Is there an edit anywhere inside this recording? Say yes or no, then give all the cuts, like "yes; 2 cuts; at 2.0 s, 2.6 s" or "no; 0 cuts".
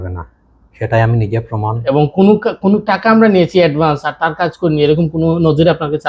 yes; 1 cut; at 1.8 s